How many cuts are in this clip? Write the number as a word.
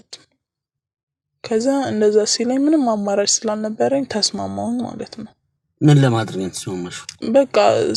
zero